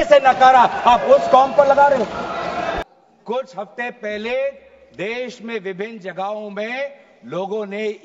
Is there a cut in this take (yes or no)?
yes